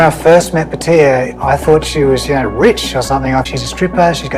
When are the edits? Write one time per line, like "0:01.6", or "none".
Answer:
0:03.5